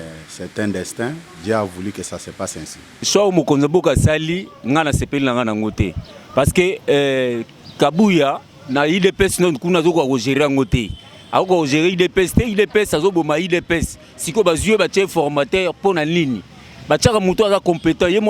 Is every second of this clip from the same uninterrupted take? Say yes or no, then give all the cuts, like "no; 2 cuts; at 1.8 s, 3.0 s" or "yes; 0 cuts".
no; 1 cut; at 3.0 s